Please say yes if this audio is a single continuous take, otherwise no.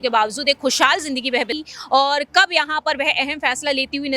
no